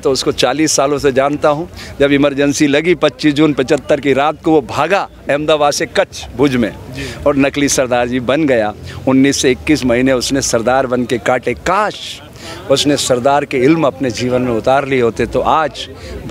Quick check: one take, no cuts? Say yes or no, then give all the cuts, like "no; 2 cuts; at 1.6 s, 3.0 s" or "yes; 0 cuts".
yes; 0 cuts